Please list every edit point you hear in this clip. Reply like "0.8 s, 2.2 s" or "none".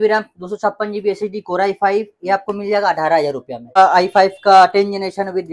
3.8 s